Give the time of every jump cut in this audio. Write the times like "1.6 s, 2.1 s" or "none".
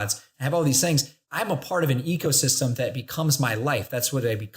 1.2 s